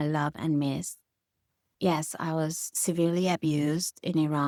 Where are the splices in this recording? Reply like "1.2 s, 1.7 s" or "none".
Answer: none